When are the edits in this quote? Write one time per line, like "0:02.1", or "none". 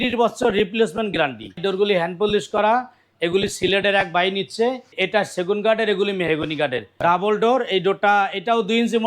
0:01.6
0:04.9
0:07.0